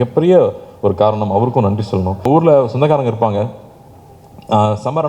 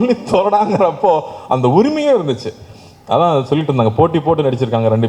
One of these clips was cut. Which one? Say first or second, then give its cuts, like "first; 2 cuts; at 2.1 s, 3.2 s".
first; 1 cut; at 2.2 s